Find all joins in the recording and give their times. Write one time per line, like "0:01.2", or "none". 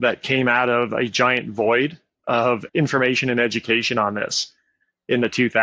none